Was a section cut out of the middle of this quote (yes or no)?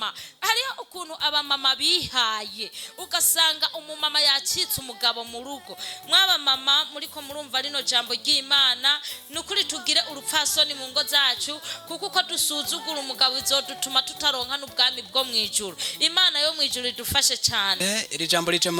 yes